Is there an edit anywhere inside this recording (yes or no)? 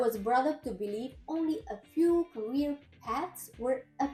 no